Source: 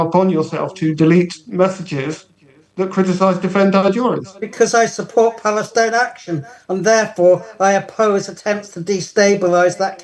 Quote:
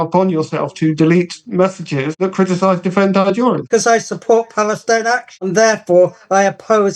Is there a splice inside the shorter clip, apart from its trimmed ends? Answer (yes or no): yes